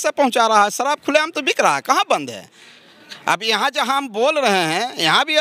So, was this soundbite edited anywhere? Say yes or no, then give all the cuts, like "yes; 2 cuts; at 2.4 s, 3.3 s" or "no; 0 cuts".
no; 0 cuts